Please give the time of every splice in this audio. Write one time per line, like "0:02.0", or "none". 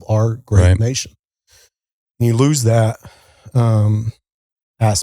none